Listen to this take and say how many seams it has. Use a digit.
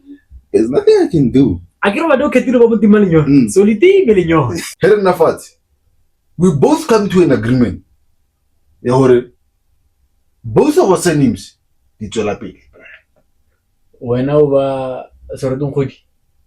1